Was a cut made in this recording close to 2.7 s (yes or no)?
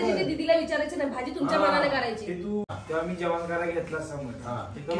yes